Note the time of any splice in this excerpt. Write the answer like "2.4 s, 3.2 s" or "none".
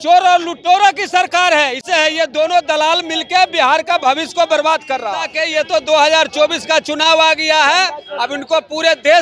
1.8 s, 5.3 s

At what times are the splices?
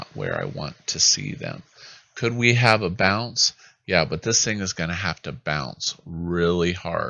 none

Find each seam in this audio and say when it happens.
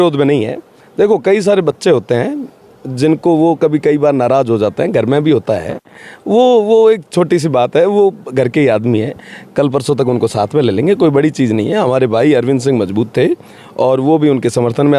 none

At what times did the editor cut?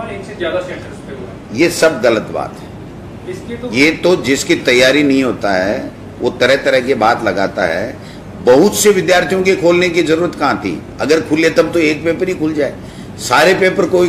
none

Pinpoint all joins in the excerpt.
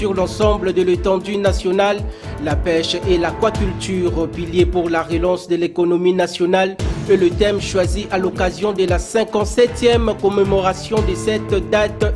none

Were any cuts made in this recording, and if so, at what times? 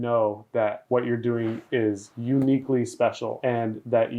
0.8 s, 3.3 s

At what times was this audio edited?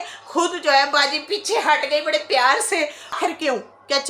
3.2 s

